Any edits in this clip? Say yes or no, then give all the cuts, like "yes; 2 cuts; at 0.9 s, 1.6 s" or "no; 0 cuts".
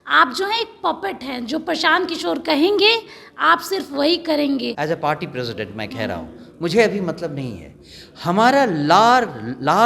yes; 1 cut; at 4.7 s